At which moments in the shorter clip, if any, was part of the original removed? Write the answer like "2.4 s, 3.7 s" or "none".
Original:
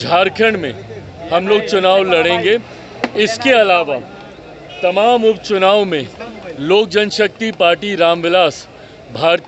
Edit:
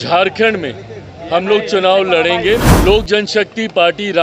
2.7 s